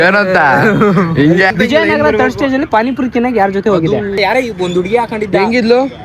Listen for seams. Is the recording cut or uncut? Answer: cut